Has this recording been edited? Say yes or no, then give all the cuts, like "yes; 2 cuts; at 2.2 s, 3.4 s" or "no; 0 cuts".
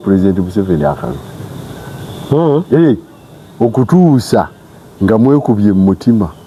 no; 0 cuts